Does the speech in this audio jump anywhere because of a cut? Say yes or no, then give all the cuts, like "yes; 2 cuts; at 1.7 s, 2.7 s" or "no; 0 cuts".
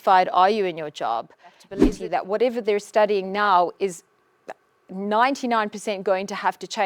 yes; 1 cut; at 1.7 s